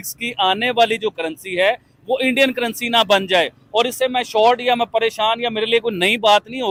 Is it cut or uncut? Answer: uncut